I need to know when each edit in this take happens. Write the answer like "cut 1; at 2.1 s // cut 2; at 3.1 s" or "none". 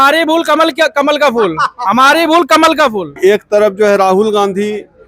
cut 1; at 3.1 s